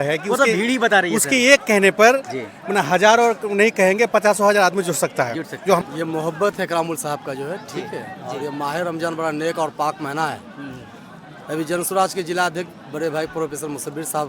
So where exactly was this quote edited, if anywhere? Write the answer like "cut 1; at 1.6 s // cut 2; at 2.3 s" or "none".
cut 1; at 5.8 s